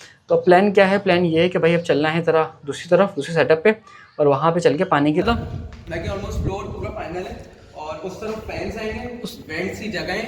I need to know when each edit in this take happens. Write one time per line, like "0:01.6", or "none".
0:05.2